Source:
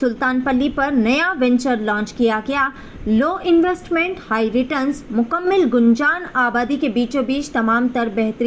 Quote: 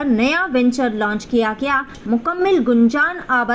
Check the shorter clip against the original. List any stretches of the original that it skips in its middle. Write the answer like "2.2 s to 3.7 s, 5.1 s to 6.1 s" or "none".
2.8 s to 5.0 s

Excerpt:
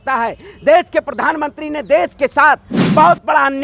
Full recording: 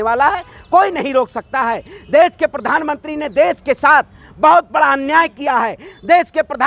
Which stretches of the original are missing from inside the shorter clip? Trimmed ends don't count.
none

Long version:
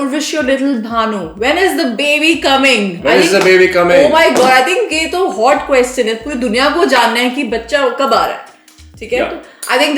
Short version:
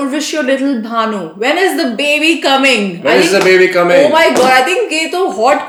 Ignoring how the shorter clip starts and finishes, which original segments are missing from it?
none

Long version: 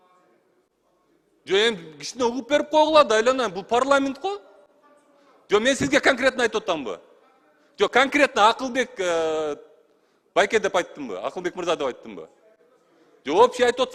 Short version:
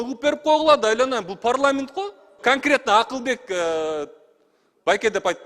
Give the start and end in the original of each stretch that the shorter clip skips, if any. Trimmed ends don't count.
4.7 s to 7.9 s

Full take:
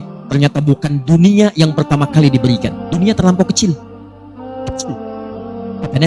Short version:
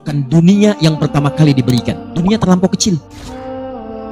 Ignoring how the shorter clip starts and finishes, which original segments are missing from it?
3.9 s to 4.3 s

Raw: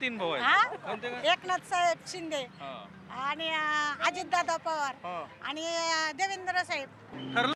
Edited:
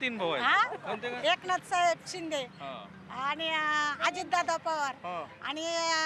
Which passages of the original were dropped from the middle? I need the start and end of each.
none

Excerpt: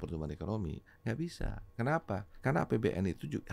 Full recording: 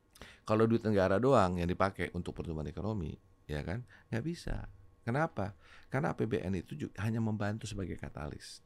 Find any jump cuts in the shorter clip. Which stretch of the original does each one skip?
3.5 s to 4.4 s, 5.6 s to 5.8 s

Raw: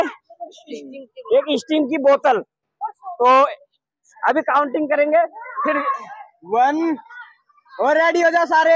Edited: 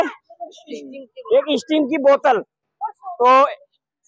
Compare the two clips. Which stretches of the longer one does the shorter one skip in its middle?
none

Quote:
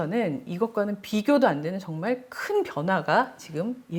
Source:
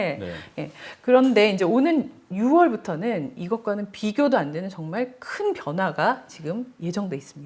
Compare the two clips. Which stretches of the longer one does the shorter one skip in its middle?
none

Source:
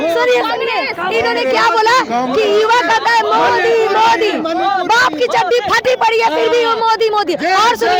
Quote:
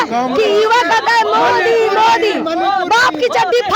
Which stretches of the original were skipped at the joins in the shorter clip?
none

